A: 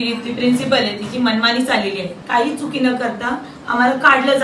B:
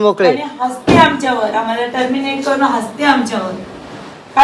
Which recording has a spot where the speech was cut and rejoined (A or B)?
A